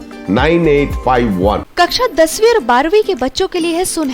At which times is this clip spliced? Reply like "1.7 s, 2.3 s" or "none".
1.7 s